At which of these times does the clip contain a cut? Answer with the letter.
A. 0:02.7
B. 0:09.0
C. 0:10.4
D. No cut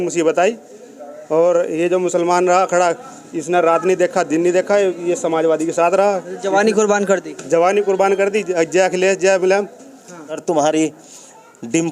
C